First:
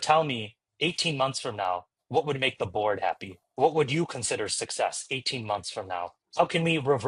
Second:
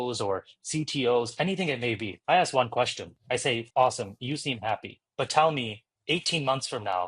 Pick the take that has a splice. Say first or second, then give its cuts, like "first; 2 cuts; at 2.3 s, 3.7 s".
second; 2 cuts; at 2.1 s, 3.6 s